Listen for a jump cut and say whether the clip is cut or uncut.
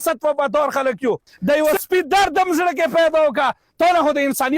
cut